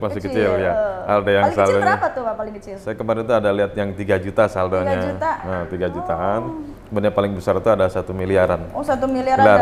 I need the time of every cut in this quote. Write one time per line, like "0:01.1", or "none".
none